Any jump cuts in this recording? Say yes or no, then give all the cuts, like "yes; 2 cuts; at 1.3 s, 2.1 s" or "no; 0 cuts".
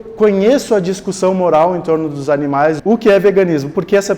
yes; 1 cut; at 2.8 s